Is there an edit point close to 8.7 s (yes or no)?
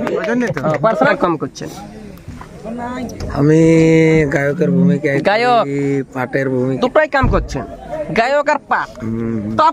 no